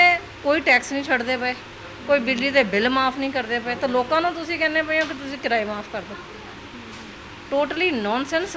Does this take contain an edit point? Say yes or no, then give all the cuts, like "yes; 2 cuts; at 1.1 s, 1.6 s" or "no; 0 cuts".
no; 0 cuts